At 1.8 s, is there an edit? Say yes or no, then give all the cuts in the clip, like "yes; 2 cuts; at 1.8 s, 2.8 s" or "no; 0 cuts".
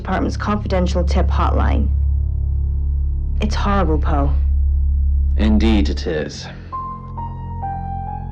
no; 1 cut; at 3.9 s